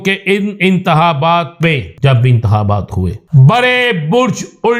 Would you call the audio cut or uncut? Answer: cut